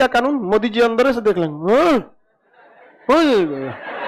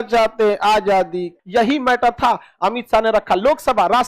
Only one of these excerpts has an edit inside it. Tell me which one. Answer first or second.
second